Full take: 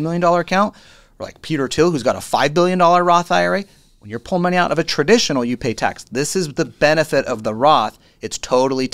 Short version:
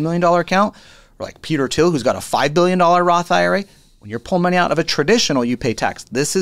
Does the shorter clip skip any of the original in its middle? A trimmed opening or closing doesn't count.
no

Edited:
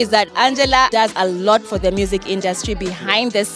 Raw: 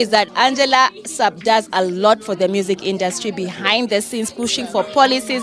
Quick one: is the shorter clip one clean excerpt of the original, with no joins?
no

